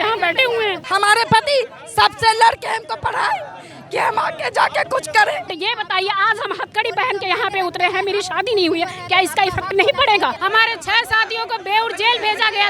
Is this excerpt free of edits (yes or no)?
no